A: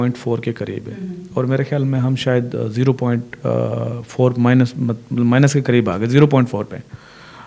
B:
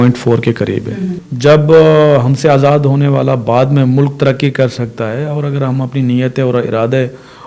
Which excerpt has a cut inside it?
B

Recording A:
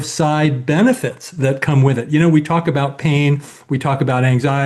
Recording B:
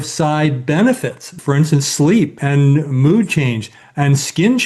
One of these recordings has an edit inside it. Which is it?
B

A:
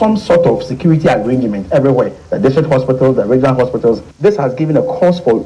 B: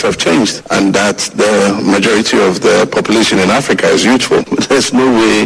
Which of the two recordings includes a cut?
B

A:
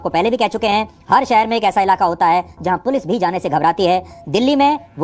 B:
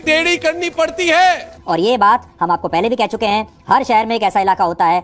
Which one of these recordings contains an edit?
B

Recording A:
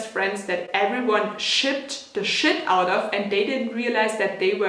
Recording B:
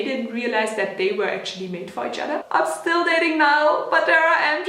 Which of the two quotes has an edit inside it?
B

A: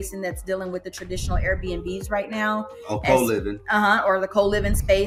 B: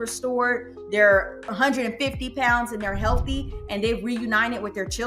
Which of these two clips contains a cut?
B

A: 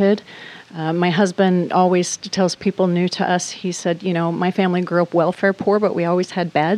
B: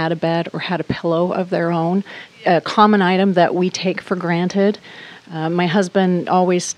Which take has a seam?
B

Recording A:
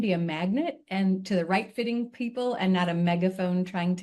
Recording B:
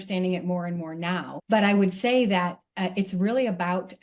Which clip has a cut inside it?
B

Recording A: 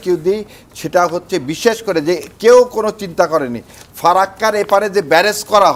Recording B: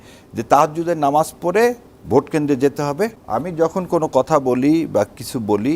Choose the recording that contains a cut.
B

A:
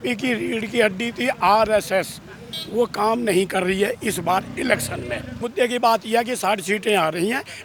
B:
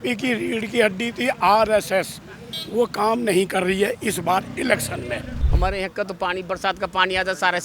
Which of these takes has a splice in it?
B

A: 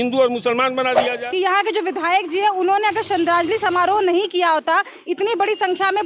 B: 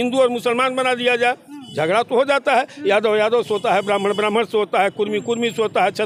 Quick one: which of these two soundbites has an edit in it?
A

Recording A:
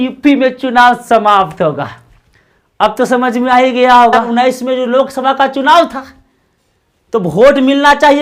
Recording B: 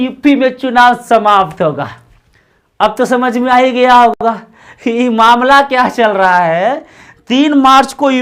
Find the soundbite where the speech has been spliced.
A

